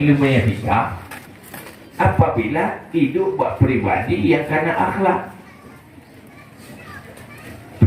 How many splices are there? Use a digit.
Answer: 0